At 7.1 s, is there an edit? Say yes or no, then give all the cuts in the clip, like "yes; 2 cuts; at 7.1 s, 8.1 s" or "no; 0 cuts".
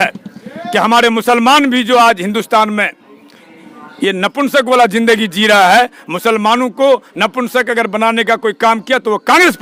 no; 0 cuts